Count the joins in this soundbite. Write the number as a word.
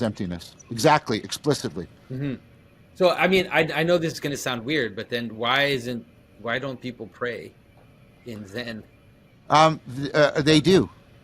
one